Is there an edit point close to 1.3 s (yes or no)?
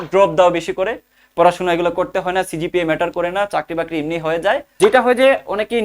no